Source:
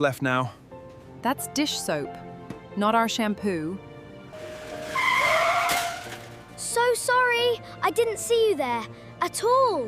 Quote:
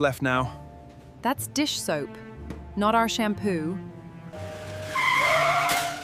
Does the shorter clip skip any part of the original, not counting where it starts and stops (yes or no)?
no